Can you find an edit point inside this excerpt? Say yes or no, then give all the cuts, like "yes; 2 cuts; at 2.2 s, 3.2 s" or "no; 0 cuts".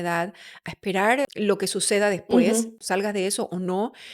yes; 2 cuts; at 1.2 s, 2.8 s